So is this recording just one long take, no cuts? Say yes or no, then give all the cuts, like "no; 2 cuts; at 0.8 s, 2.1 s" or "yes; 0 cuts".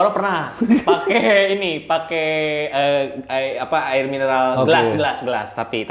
yes; 0 cuts